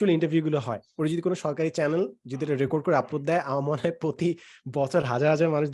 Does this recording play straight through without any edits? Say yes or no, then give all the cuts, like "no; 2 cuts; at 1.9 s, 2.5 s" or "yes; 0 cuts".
yes; 0 cuts